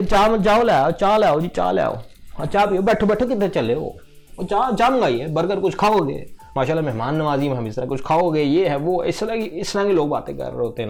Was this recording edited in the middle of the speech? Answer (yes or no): no